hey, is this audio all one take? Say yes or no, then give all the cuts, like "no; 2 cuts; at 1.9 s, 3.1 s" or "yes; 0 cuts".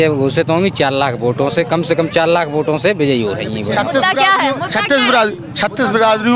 yes; 0 cuts